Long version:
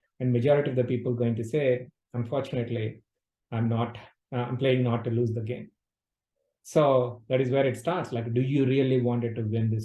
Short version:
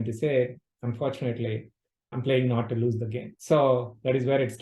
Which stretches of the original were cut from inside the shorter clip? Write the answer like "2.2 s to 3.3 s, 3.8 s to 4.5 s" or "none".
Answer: 3.5 s to 4.5 s, 5.6 s to 6.5 s